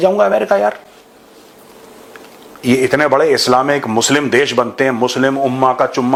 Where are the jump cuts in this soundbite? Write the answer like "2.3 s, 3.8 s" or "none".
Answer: none

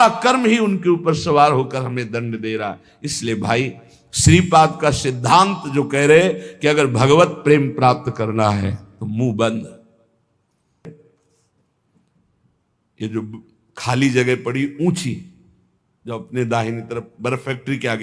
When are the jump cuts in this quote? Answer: 10.9 s

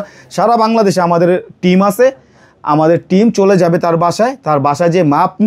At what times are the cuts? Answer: none

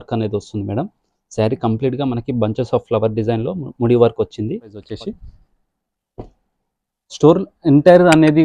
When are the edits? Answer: 4.8 s

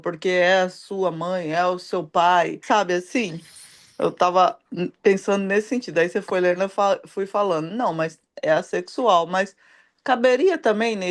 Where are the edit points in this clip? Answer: 2.6 s

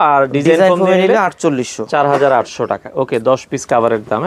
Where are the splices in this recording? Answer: none

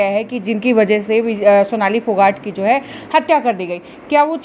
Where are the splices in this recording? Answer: none

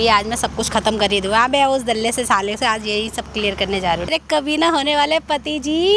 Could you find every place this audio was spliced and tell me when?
4.1 s

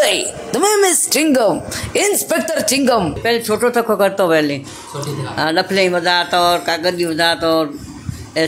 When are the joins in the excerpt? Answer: 3.2 s

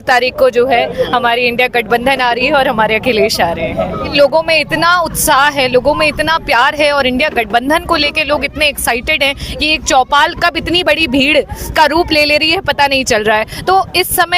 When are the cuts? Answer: 4.1 s

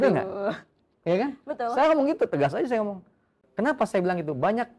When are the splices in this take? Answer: none

